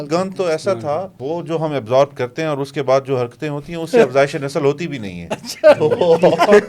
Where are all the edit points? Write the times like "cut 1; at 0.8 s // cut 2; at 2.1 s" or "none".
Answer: cut 1; at 1.2 s